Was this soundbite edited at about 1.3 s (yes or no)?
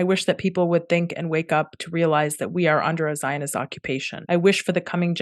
no